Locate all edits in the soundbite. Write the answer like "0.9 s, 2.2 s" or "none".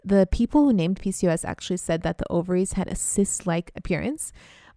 3.7 s